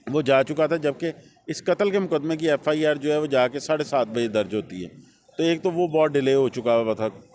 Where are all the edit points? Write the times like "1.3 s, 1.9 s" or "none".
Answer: none